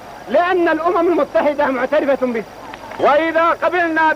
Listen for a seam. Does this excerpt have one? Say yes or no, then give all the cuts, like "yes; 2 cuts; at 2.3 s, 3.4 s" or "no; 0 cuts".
yes; 1 cut; at 2.9 s